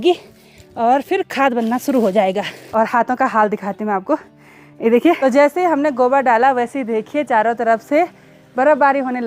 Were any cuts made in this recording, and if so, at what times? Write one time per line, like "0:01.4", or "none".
0:02.5
0:05.2

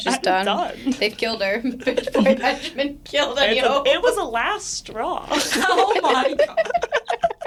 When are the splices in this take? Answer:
none

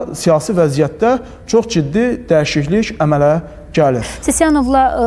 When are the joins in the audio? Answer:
0:04.1

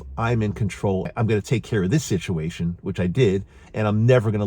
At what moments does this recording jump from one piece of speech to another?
0:01.1

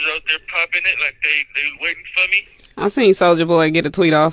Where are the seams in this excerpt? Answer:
none

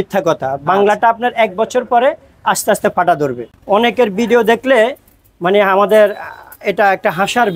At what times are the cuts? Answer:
0:03.5

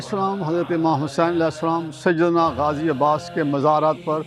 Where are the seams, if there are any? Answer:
none

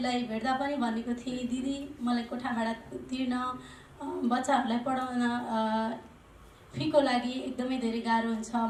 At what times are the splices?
none

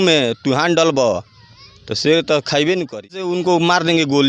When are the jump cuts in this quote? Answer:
0:03.3

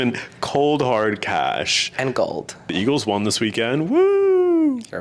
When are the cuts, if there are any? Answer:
0:02.6

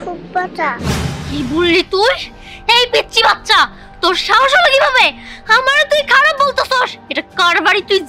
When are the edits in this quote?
none

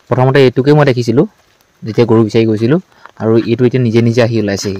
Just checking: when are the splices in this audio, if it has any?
none

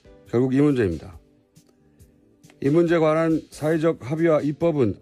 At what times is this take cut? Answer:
0:04.0

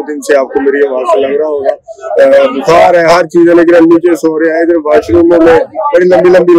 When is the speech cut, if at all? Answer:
none

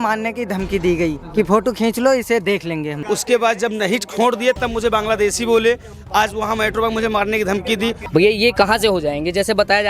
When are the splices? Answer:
0:01.2
0:02.9
0:08.0

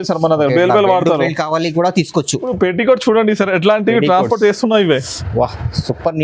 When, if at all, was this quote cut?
0:02.5

